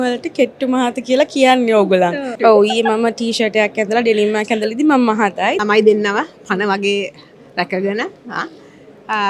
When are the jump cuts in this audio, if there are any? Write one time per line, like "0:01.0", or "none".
0:02.3
0:05.6